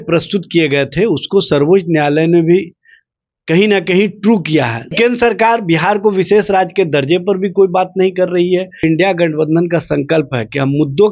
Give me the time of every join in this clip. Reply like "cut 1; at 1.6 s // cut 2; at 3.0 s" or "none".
cut 1; at 4.9 s // cut 2; at 8.8 s